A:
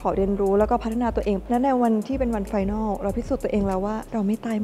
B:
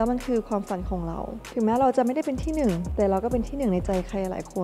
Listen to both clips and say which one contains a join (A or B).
A